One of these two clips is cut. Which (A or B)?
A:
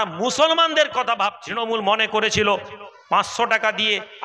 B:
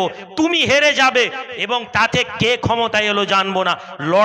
A